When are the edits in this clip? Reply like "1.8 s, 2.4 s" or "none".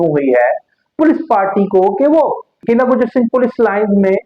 2.5 s